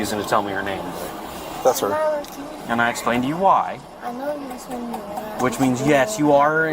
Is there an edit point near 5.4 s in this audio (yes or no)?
no